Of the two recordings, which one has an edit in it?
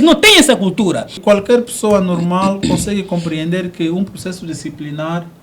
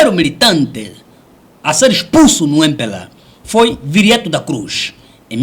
first; 1 cut; at 1.2 s

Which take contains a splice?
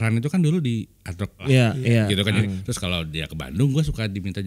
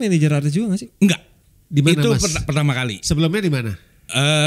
first; 2 cuts; at 1.4 s, 2.4 s

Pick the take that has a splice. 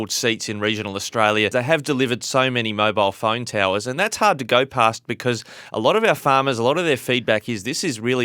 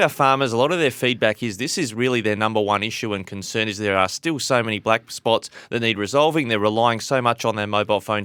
first; 1 cut; at 1.5 s

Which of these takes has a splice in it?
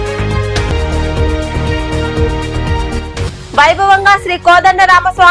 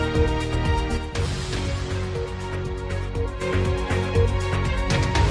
second; 1 cut; at 1.1 s

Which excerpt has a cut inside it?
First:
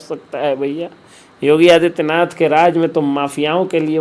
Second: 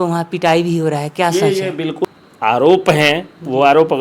second; 1 cut; at 2.0 s

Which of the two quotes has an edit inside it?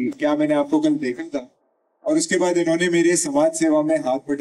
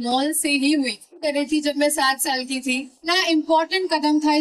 second; 2 cuts; at 1.2 s, 3.1 s

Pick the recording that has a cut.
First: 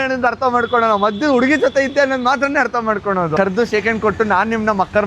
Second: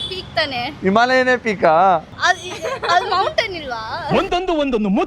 first; 1 cut; at 3.4 s

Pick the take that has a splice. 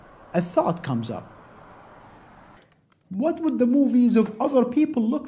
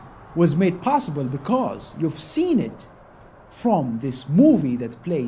second; 1 cut; at 4.0 s

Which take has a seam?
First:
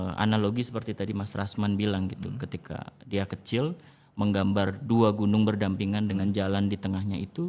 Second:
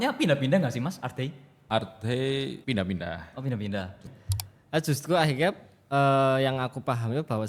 second; 3 cuts; at 1.5 s, 2.6 s, 4.0 s

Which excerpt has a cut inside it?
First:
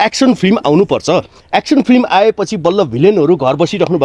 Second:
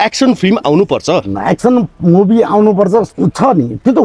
second; 2 cuts; at 1.3 s, 3.1 s

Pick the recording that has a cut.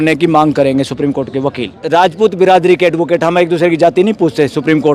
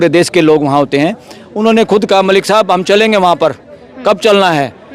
first; 1 cut; at 2.1 s

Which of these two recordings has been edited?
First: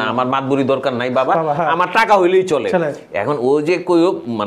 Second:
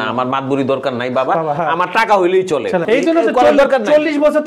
second; 1 cut; at 2.8 s

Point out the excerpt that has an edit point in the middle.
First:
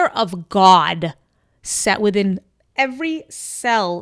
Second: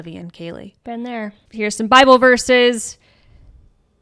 second; 1 cut; at 1.4 s

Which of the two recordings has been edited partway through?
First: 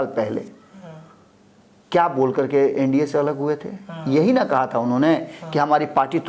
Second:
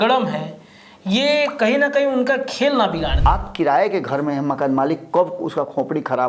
second; 1 cut; at 3.2 s

